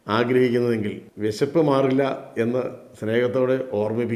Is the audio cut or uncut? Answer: cut